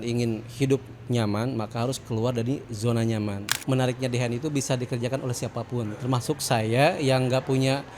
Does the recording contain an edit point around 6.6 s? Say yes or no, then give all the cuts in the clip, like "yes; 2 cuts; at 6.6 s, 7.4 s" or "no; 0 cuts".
no; 1 cut; at 3.5 s